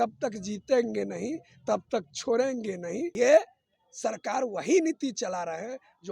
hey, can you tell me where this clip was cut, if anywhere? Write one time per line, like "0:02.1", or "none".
0:03.1